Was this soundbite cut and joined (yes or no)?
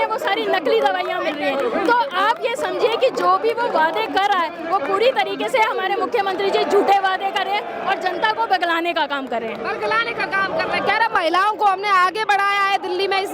no